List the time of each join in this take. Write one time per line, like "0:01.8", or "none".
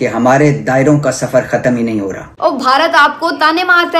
0:02.3